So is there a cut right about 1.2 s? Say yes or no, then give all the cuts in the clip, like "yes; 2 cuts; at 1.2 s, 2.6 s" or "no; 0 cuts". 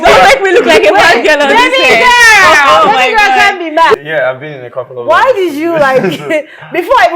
no; 1 cut; at 3.9 s